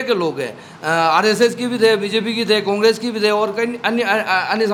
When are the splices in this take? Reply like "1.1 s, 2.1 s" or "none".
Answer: none